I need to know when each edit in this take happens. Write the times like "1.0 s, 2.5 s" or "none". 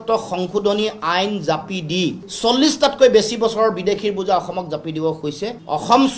2.3 s